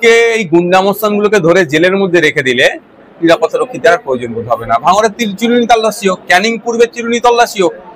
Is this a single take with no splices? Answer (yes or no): yes